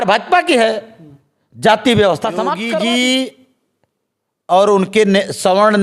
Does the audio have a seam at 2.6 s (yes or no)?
yes